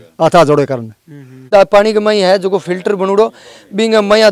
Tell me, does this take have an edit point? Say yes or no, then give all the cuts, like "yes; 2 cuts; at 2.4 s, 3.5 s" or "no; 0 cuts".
yes; 1 cut; at 1.3 s